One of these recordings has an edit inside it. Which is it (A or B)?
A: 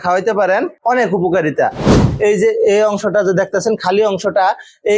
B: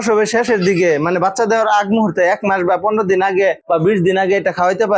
A